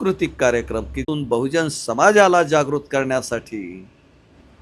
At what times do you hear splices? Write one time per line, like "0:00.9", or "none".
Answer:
0:01.1